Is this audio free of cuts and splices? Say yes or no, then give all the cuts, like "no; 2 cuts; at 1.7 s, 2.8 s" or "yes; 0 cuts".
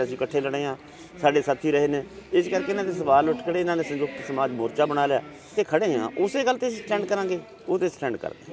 no; 1 cut; at 5.6 s